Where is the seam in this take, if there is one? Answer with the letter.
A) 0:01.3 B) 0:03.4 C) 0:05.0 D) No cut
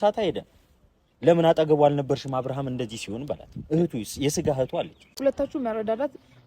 C